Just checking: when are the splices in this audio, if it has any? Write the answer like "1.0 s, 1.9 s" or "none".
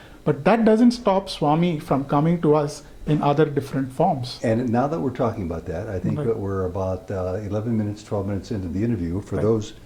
none